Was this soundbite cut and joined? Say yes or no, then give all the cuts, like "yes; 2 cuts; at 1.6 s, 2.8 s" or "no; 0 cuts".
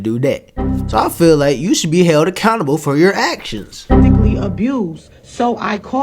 yes; 1 cut; at 4.2 s